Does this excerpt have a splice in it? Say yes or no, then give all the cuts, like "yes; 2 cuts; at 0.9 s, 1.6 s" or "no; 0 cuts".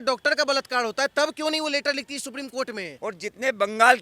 yes; 1 cut; at 2.9 s